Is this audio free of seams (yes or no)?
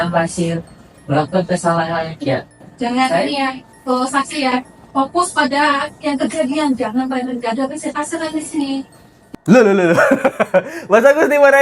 yes